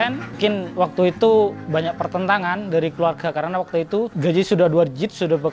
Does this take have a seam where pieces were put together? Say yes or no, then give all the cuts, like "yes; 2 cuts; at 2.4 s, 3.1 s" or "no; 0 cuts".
no; 0 cuts